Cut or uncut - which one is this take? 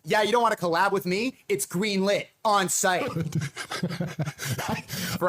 cut